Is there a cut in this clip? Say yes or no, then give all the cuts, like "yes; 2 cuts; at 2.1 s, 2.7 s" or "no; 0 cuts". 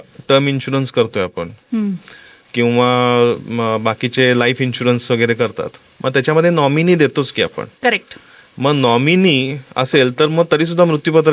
no; 0 cuts